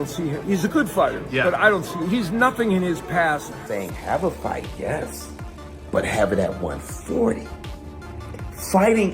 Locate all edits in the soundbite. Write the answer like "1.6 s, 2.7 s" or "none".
3.6 s